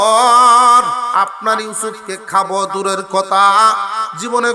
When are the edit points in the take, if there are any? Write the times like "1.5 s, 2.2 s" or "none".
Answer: 1.1 s